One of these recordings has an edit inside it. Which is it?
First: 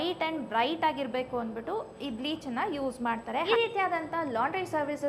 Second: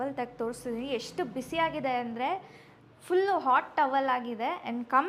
first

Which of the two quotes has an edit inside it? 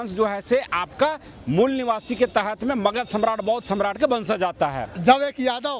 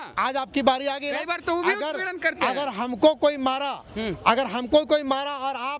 first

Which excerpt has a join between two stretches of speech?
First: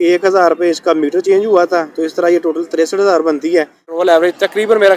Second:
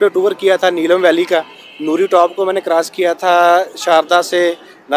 first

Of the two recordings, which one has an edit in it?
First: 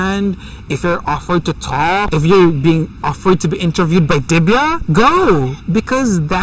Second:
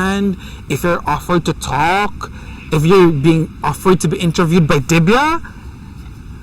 first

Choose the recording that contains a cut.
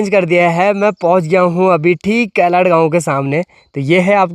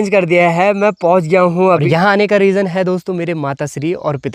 second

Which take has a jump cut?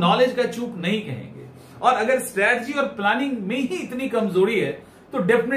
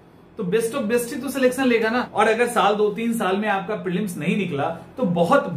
second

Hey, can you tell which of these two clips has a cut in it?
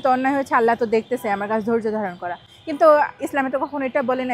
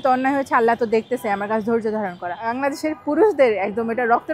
second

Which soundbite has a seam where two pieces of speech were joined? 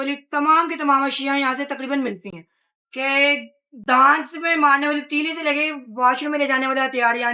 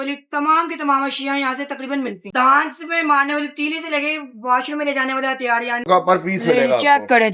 second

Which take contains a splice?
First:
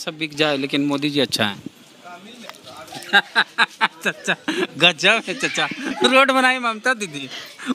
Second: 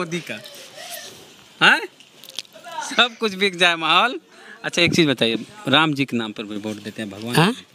first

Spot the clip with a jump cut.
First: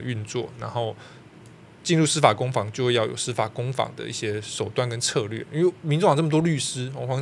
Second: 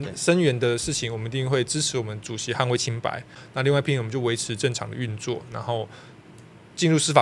second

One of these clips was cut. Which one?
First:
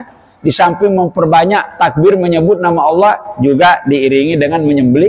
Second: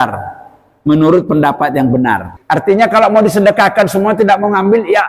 second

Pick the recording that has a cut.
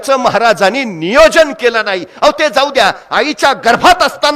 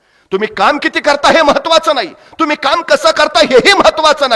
second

